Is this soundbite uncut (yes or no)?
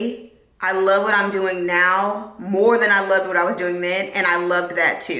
yes